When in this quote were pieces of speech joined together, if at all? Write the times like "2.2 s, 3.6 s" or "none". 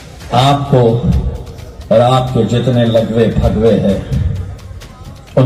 none